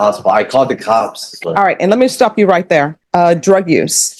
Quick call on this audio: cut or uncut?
cut